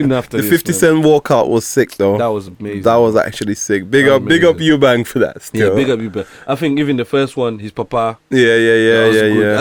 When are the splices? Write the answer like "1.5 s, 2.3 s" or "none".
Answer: none